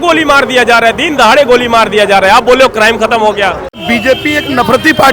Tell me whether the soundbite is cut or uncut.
cut